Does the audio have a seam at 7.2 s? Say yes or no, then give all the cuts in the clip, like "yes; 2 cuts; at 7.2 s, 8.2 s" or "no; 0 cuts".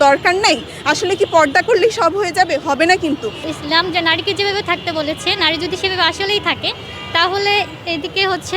no; 1 cut; at 3.5 s